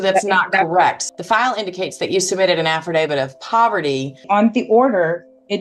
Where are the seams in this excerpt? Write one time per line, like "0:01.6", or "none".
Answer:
0:01.0
0:04.2